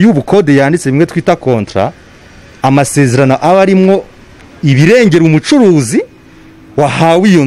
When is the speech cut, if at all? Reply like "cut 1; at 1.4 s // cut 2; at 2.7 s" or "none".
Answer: none